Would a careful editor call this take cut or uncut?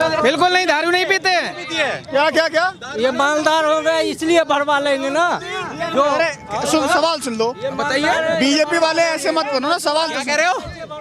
uncut